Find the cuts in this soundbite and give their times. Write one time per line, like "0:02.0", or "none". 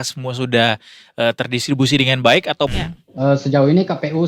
0:02.7